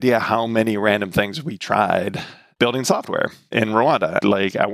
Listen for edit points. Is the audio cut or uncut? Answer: uncut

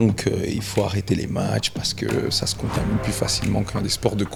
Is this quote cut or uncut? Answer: uncut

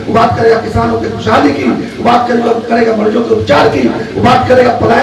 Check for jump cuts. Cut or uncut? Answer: uncut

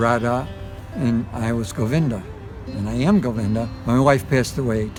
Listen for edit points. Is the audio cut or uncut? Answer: uncut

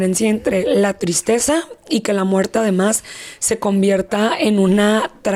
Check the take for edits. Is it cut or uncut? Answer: uncut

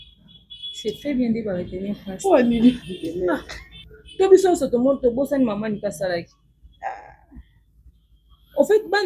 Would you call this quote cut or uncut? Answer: cut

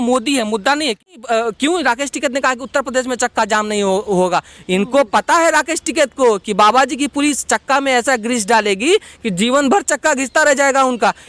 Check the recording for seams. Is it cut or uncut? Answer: cut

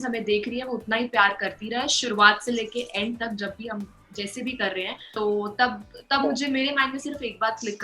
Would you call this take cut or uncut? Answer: cut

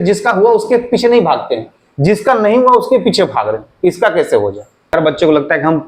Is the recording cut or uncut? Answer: cut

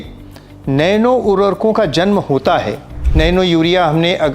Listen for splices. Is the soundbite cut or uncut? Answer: cut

